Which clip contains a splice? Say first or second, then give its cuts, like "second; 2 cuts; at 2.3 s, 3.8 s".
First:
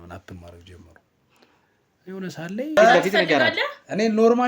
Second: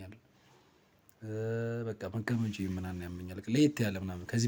first; 1 cut; at 2.8 s